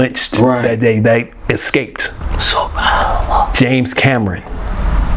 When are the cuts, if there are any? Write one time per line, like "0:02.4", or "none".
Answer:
none